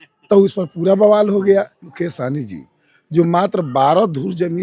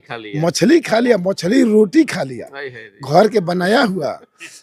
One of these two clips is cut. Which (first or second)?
first